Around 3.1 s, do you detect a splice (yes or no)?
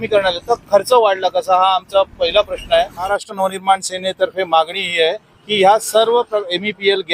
yes